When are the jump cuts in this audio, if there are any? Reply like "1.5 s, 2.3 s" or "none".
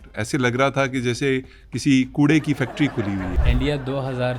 3.4 s